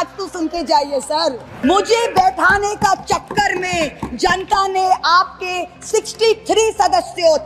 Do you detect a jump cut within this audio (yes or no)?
yes